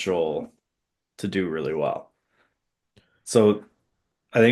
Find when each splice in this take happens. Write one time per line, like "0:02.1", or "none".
none